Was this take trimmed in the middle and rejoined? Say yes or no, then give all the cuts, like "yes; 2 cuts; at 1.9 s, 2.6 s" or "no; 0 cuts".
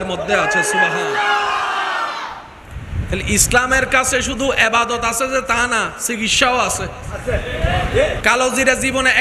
yes; 1 cut; at 8.2 s